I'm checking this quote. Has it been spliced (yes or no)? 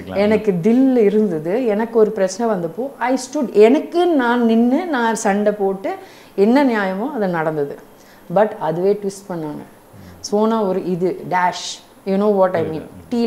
no